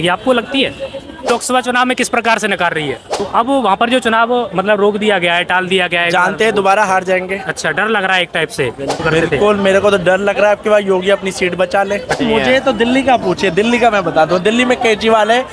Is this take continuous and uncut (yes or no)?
no